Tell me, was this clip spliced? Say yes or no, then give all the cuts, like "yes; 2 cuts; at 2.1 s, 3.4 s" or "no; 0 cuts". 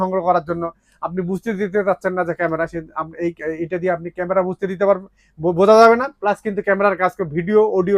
no; 0 cuts